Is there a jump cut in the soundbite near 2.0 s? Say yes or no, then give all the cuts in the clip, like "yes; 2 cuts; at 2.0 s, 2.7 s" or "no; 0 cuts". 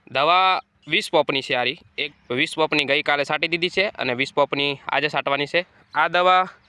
yes; 2 cuts; at 2.0 s, 5.8 s